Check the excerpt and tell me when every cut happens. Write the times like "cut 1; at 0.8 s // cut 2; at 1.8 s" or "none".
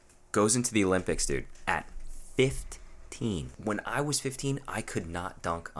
cut 1; at 3.5 s